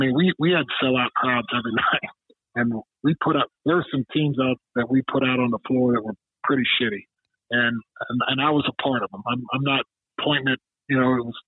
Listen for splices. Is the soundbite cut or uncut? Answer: cut